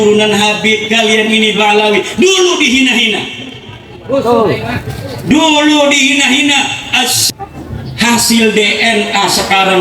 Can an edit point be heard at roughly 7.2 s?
yes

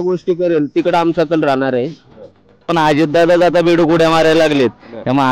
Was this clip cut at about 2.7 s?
yes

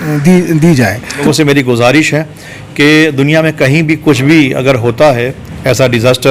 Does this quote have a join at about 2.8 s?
no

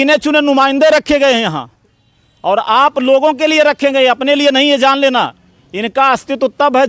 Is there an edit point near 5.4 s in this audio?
no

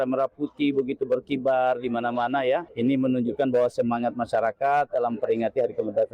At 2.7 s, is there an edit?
yes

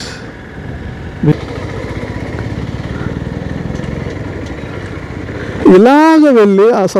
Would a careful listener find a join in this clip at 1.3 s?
yes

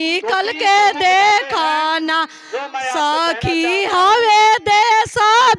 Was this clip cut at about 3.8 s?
no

